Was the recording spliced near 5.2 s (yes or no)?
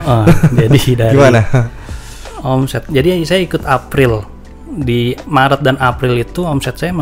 no